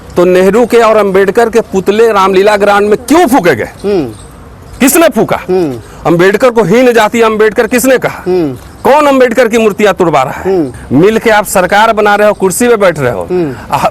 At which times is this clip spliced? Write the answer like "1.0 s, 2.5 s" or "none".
10.8 s